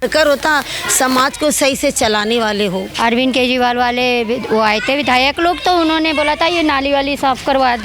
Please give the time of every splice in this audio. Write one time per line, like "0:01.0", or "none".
0:02.9